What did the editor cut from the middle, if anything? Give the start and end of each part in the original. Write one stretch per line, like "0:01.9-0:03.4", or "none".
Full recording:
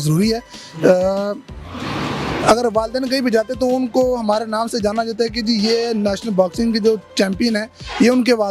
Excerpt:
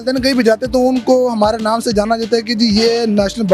none